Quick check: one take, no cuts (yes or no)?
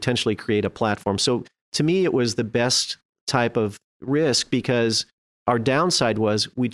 no